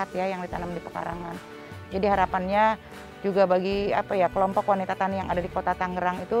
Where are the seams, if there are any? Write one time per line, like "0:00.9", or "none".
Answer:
none